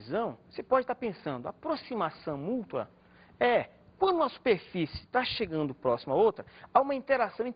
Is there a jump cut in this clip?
yes; 1 cut; at 2.0 s

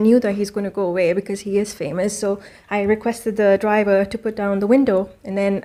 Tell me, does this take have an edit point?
no; 0 cuts

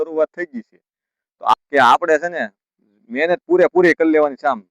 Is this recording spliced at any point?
yes; 1 cut; at 1.5 s

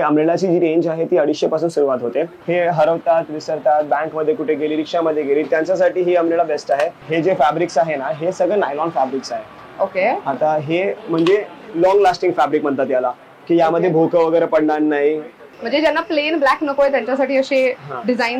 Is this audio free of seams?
no; 3 cuts; at 2.4 s, 7.0 s, 15.5 s

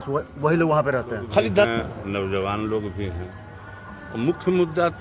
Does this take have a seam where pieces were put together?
yes; 1 cut; at 1.7 s

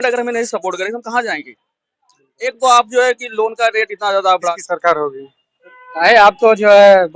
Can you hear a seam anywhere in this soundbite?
yes; 1 cut; at 4.5 s

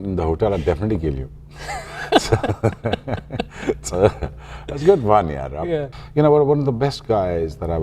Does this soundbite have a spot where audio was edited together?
yes; 1 cut; at 5.9 s

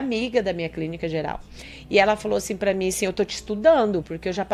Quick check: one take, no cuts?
yes; 0 cuts

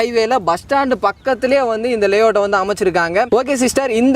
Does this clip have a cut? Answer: no; 0 cuts

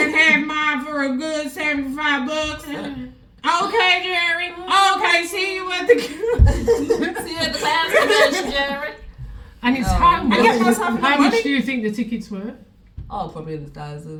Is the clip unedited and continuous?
yes; 0 cuts

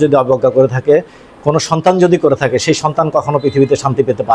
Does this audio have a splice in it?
no; 0 cuts

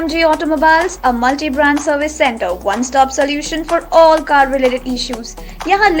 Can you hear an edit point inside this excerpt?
no; 0 cuts

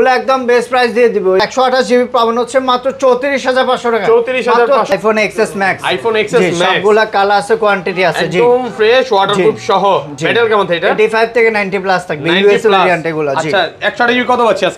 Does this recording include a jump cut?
yes; 2 cuts; at 1.4 s, 4.9 s

